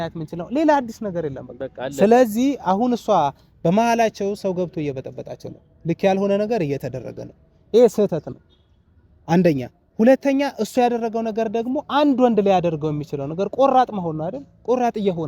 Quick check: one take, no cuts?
yes; 0 cuts

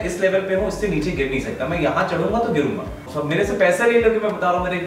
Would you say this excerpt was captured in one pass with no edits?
no; 1 cut; at 3.1 s

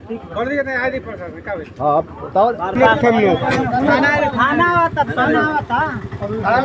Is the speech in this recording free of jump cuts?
no; 1 cut; at 2.8 s

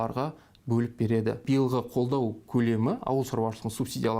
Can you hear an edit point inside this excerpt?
yes; 1 cut; at 1.4 s

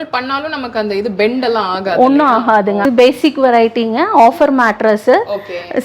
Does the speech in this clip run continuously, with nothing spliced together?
no; 1 cut; at 2.8 s

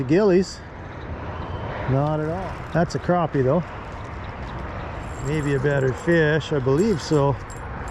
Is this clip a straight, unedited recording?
no; 2 cuts; at 2.4 s, 5.3 s

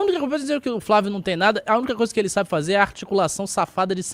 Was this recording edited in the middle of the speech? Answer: no; 0 cuts

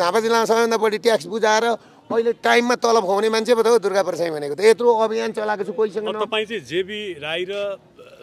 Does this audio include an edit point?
no; 0 cuts

